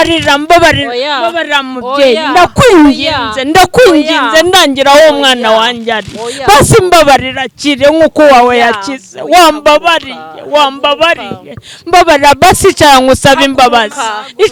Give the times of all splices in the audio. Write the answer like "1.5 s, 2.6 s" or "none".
none